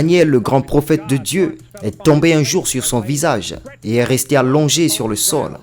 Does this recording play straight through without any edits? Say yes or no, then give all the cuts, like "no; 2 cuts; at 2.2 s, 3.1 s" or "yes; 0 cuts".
yes; 0 cuts